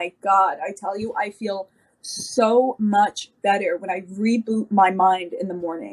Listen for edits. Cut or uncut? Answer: uncut